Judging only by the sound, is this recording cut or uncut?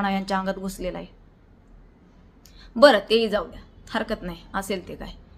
uncut